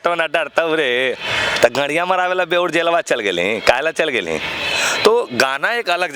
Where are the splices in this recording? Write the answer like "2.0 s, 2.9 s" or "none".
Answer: none